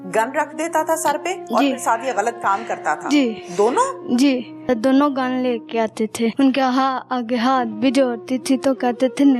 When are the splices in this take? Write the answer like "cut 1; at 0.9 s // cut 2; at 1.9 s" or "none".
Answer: cut 1; at 4.7 s // cut 2; at 6.3 s

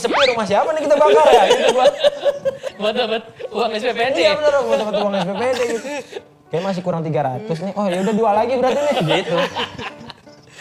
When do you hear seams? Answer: none

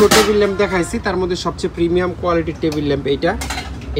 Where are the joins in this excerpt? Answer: none

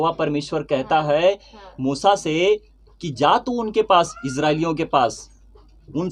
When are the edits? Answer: none

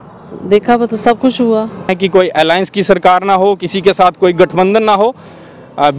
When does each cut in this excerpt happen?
cut 1; at 1.9 s

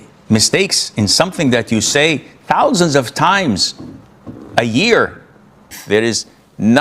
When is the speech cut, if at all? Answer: cut 1; at 5.7 s

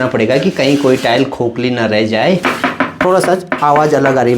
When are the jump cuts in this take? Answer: cut 1; at 2.4 s

